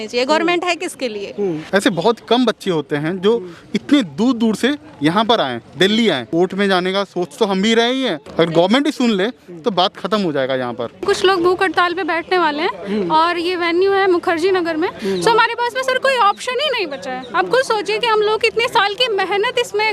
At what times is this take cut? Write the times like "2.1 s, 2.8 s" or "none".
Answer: 1.6 s, 6.3 s, 8.2 s, 10.9 s, 15.0 s